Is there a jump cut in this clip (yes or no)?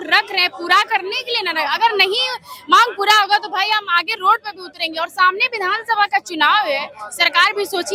no